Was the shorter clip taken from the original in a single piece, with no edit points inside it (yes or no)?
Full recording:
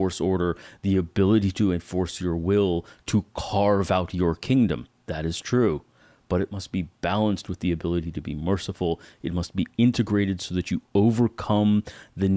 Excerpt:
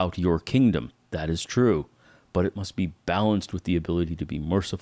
yes